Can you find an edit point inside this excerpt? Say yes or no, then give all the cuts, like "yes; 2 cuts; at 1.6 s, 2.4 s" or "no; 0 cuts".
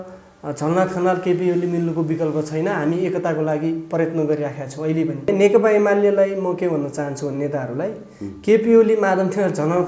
yes; 1 cut; at 5.3 s